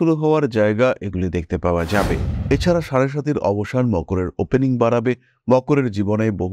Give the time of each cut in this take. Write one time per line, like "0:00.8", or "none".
0:02.3